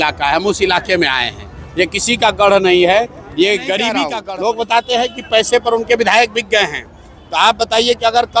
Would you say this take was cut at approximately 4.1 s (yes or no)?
yes